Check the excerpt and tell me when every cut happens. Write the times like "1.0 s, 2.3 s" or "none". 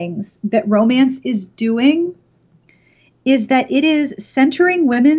none